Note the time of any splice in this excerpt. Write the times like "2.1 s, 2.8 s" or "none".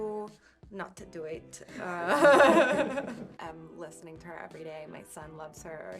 3.3 s